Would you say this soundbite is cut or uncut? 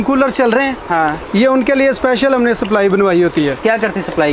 uncut